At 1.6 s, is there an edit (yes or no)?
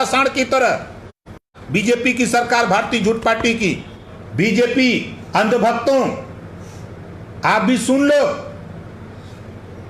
yes